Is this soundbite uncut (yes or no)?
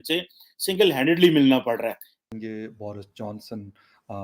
no